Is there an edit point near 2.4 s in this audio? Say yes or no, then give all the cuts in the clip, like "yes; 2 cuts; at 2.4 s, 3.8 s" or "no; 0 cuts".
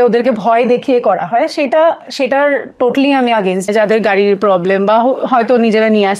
no; 1 cut; at 3.7 s